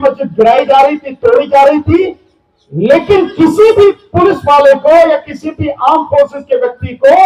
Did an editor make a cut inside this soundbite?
no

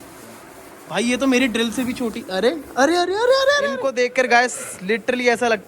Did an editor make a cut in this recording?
yes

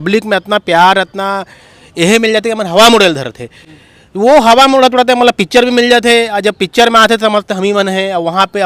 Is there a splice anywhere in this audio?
no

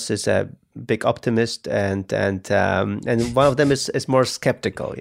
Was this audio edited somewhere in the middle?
no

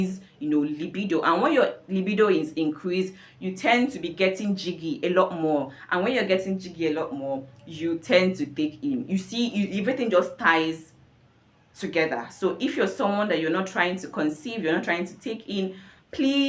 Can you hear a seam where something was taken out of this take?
no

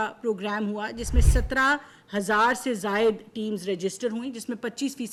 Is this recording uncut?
yes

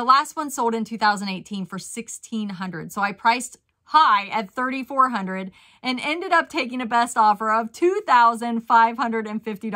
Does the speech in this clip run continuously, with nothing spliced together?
yes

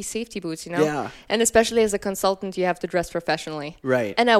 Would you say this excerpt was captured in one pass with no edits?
no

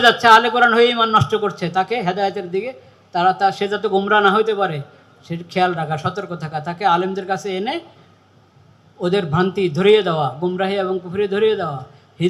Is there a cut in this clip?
no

